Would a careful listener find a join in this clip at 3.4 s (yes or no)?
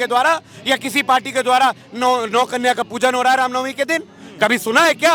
no